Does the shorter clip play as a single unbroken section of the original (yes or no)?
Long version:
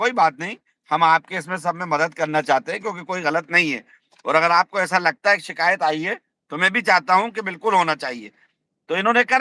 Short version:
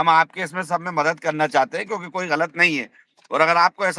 yes